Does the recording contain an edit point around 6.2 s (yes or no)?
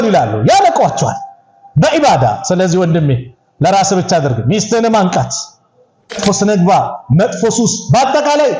yes